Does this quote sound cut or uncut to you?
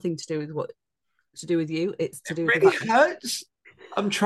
uncut